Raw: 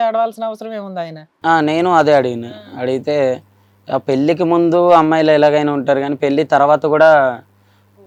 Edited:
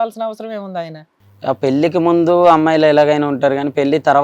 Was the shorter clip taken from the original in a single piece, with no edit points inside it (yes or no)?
no